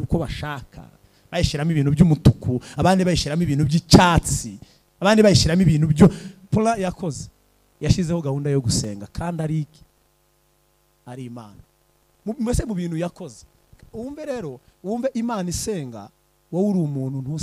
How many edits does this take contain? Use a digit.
1